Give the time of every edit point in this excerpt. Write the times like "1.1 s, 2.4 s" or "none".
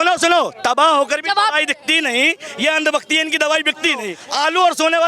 4.1 s